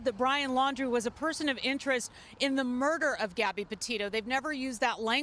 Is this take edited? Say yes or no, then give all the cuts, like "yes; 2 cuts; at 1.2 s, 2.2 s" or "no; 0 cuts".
yes; 1 cut; at 4.3 s